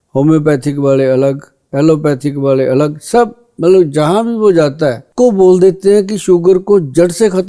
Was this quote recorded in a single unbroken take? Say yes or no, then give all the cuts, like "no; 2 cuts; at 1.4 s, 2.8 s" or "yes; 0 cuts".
no; 1 cut; at 5.1 s